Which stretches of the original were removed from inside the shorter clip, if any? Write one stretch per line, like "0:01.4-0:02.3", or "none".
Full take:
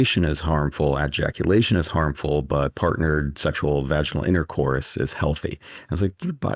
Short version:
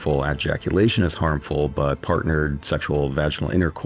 none